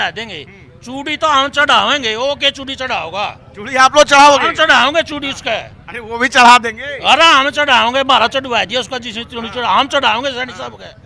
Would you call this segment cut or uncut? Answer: uncut